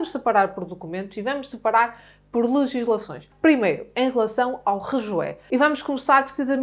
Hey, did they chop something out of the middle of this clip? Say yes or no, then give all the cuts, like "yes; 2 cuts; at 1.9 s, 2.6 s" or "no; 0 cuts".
yes; 2 cuts; at 3.3 s, 5.4 s